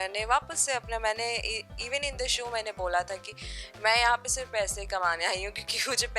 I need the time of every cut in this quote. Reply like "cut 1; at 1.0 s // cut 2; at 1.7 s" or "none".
none